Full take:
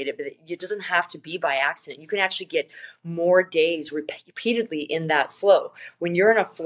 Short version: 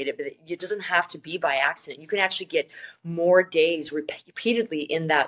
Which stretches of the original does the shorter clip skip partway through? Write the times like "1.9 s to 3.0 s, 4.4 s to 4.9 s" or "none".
none

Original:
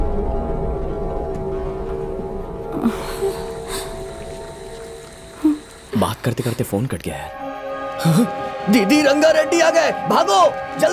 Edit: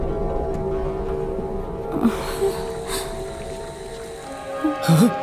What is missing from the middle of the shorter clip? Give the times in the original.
5.1 s to 7.5 s

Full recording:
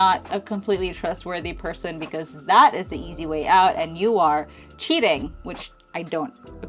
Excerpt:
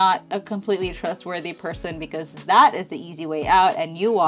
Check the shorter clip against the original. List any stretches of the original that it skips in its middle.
none

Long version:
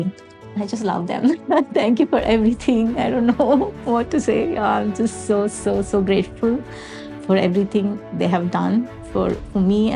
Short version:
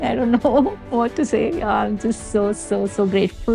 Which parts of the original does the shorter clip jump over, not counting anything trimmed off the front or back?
none

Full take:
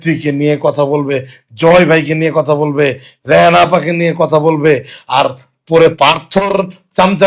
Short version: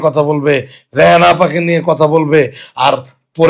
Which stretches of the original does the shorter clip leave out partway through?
none

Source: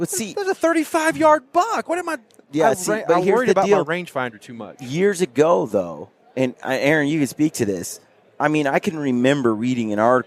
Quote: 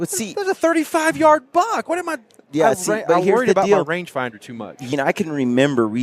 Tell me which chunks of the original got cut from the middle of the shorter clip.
4.9 s to 8.6 s

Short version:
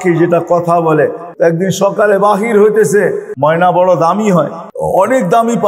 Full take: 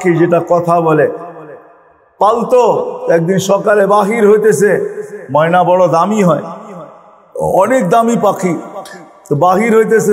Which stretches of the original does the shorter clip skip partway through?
1.3 s to 3.0 s, 4.9 s to 5.2 s, 6.6 s to 7.2 s

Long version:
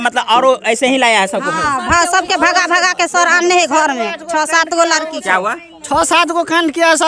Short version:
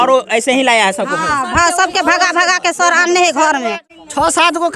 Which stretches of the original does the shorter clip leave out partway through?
4.2 s to 5.6 s

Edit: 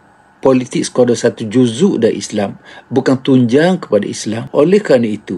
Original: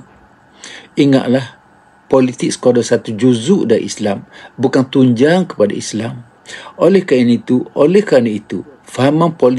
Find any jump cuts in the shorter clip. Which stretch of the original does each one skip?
6.1 s to 7.7 s

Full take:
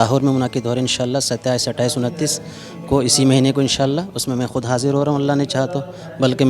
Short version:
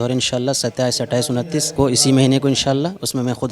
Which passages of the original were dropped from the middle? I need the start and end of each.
2.4 s to 2.8 s

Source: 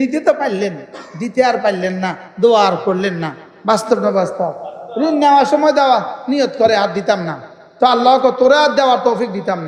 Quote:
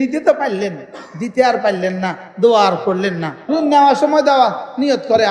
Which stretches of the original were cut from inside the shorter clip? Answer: 3.3 s to 4.8 s

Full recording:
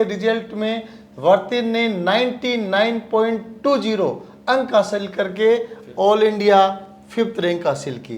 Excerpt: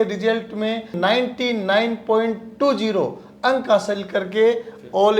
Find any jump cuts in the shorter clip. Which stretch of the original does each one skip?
0.9 s to 2.0 s

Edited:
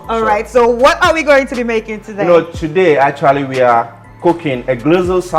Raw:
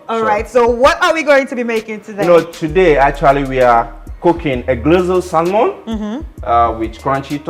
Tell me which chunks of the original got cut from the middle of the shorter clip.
none

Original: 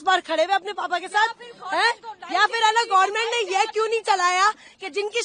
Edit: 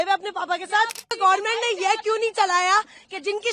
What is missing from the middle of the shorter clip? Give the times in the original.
1.6 s to 2.9 s

